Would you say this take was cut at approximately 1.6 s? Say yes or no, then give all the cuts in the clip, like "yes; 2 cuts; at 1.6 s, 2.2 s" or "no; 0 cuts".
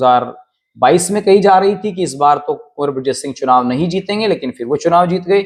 no; 0 cuts